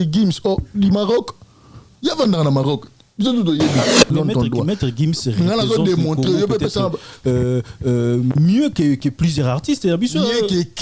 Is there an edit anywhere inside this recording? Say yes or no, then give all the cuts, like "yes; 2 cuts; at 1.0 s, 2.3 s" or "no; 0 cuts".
yes; 1 cut; at 4.1 s